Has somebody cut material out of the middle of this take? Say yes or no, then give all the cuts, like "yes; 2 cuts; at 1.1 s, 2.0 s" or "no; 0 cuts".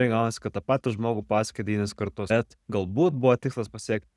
yes; 1 cut; at 2.3 s